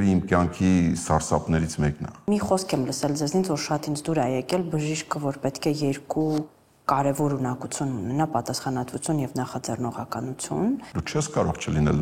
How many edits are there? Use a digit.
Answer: 2